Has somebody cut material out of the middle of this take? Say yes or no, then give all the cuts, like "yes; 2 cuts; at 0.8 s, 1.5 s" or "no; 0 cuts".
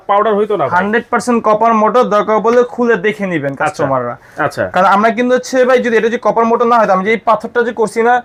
no; 0 cuts